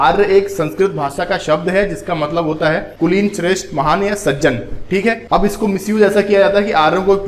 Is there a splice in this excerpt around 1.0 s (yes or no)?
no